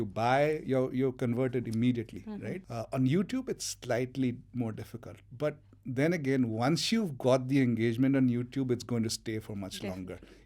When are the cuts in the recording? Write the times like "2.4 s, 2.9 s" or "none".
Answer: 2.6 s

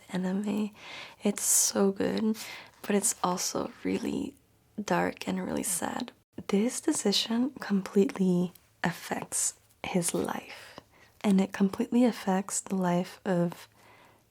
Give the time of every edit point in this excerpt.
6.2 s

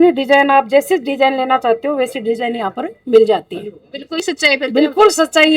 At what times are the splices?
4.2 s

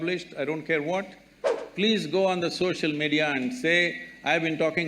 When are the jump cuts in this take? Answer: 1.6 s

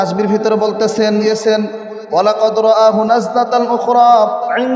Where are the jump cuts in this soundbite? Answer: 1.2 s

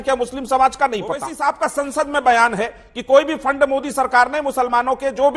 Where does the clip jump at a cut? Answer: 1.3 s

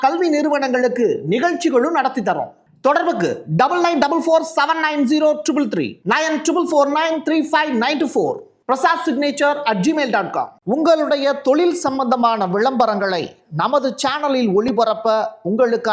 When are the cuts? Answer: 10.5 s

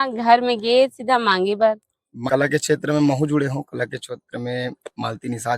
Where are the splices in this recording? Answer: 2.1 s

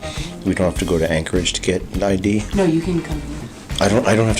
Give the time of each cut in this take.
2.5 s

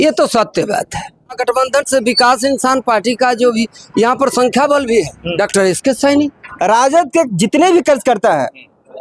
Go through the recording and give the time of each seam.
1.4 s, 5.2 s, 6.4 s

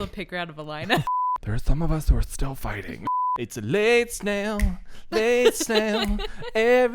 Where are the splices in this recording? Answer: 1.1 s, 3.0 s

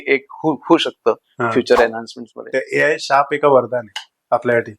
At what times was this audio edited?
2.4 s

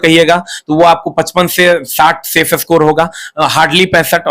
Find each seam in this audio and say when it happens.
none

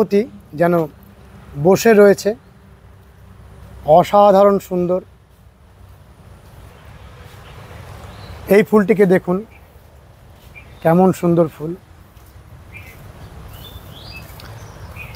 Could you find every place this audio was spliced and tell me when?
6.7 s

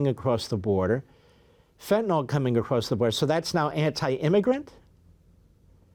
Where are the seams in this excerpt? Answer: none

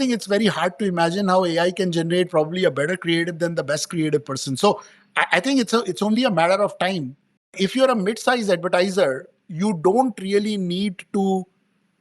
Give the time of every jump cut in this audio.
7.4 s

